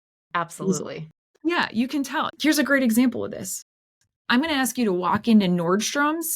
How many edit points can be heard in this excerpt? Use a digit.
1